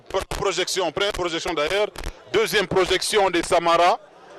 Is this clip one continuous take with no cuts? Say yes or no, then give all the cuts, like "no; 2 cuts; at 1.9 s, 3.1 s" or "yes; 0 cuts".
yes; 0 cuts